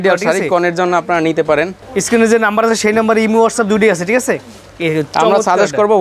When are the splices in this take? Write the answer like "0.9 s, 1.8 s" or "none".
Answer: none